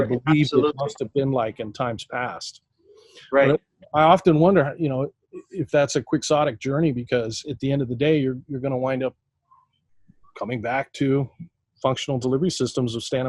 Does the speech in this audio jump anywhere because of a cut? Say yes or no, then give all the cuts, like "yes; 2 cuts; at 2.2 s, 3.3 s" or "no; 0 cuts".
no; 0 cuts